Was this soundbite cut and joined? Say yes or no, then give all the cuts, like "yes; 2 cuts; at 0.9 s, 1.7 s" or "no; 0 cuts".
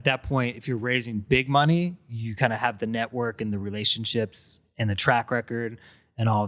no; 0 cuts